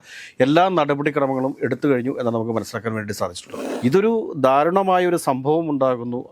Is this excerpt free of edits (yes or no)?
no